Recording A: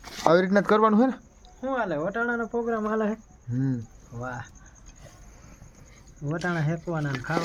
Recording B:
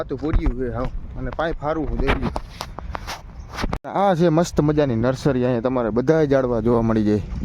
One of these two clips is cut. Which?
B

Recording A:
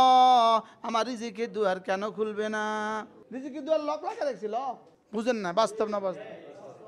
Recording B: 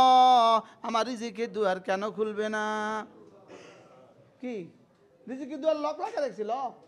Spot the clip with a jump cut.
A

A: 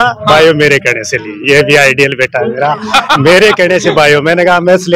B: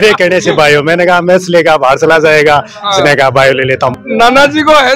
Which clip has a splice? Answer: B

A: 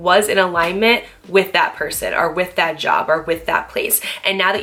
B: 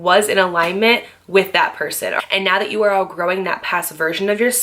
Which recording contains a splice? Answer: B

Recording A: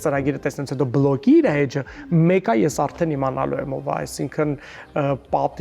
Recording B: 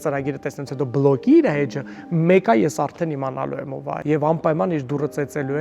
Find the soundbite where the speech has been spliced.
B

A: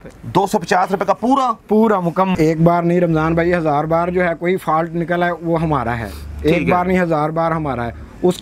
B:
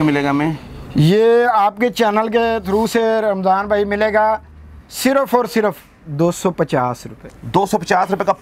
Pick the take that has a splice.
A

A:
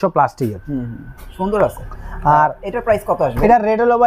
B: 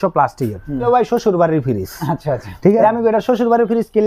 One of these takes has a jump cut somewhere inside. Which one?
B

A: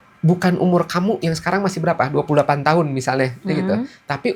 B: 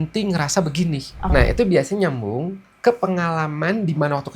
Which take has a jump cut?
B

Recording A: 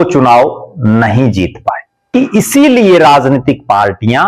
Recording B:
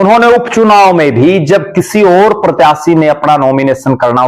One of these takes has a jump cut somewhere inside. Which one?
A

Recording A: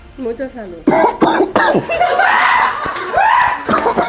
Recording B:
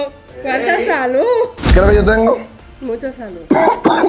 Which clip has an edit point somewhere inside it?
B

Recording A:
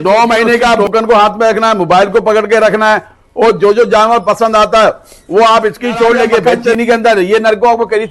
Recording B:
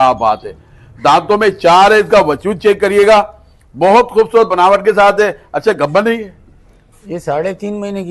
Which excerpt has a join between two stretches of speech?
A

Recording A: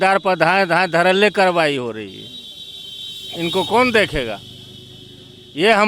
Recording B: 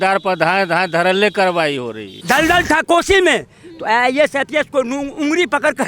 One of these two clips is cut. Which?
B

